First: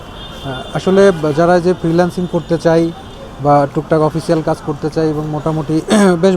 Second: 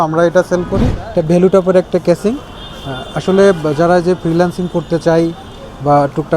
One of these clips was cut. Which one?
second; 1 cut; at 1.0 s

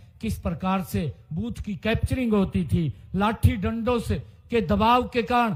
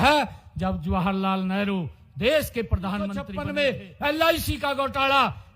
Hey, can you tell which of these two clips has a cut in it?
second; 1 cut; at 3.4 s

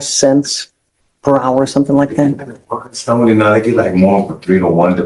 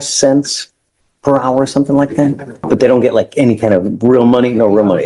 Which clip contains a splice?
second; 1 cut; at 2.7 s

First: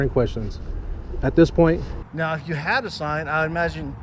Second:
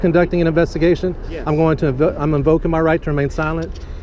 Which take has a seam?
first; 1 cut; at 1.9 s

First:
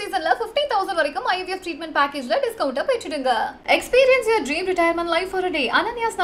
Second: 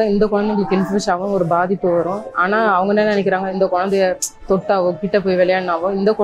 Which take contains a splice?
second; 2 cuts; at 2.3 s, 3.5 s

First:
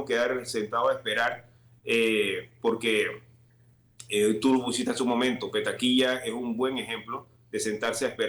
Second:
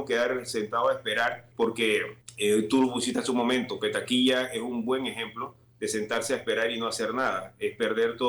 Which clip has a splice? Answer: second; 2 cuts; at 1.4 s, 2.2 s

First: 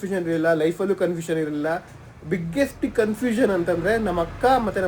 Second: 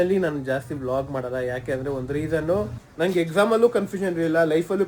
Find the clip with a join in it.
second; 1 cut; at 2.8 s

